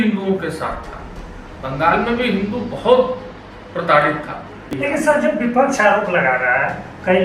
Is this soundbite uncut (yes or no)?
no